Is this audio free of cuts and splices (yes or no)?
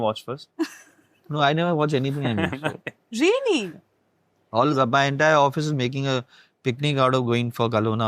yes